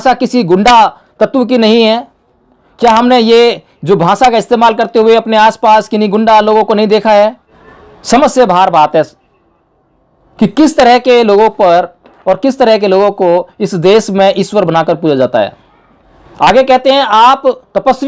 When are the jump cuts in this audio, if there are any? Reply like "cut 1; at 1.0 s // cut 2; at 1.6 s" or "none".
none